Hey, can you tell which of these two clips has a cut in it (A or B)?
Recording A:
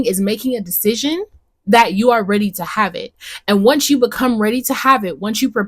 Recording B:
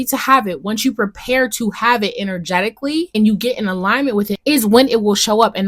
B